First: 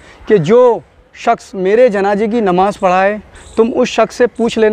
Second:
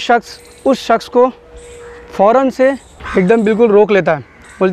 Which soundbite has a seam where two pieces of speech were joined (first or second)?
second